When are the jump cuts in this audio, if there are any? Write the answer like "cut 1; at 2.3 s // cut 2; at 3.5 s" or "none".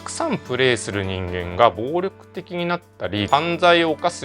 none